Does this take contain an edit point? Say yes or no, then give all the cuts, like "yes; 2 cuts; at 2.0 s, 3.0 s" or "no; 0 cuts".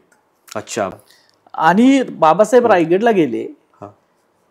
yes; 1 cut; at 1.0 s